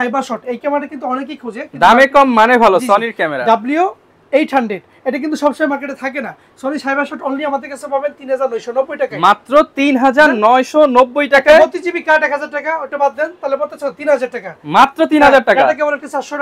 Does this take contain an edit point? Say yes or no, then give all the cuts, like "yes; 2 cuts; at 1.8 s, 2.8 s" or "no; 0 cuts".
no; 0 cuts